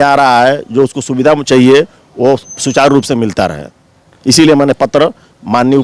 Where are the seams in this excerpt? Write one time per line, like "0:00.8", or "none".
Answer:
none